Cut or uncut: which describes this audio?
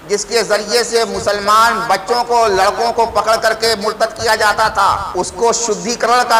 cut